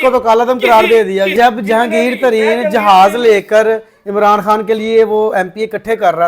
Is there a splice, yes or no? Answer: yes